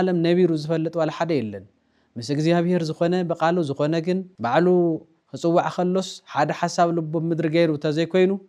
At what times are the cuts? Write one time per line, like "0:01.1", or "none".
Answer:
0:04.3